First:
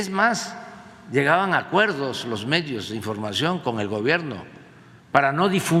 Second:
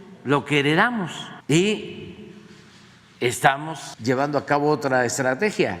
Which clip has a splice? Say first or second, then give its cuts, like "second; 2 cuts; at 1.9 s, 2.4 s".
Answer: second; 2 cuts; at 1.3 s, 3.9 s